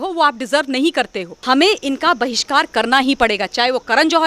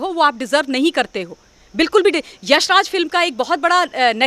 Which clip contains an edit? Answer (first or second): first